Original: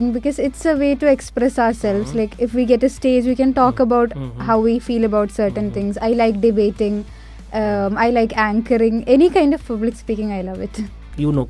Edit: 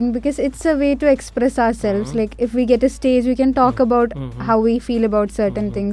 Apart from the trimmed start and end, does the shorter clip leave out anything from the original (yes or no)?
no